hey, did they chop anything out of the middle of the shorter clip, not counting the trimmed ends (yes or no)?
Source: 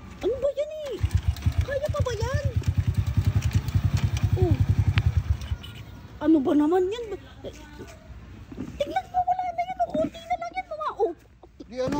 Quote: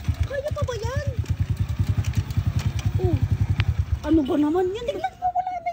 yes